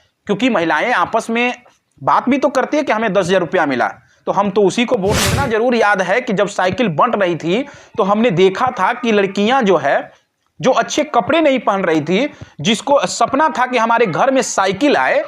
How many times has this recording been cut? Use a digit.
1